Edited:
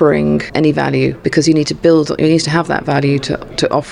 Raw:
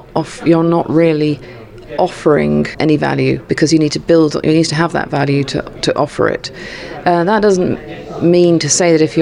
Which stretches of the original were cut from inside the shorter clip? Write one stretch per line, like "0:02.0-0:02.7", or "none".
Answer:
none